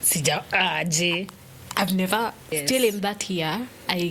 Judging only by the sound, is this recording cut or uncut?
cut